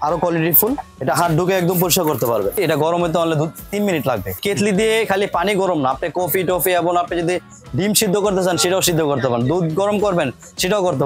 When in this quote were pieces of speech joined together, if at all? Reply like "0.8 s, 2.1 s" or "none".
0.9 s, 2.5 s, 4.4 s